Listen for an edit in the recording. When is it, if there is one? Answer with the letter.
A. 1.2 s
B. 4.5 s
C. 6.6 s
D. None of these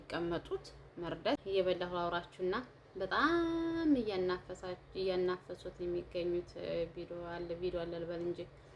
A